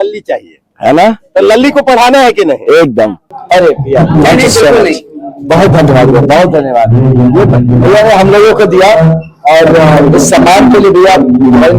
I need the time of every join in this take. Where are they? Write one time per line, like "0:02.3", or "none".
0:03.3